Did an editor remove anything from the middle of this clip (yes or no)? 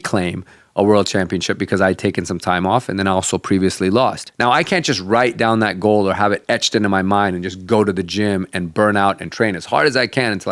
yes